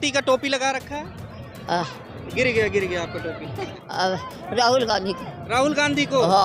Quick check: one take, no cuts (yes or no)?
no